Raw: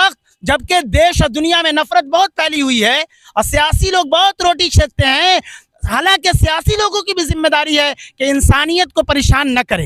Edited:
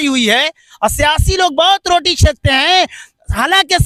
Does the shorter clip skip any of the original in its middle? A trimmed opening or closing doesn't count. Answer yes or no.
no